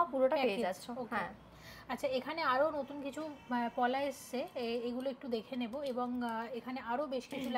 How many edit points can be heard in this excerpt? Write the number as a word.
zero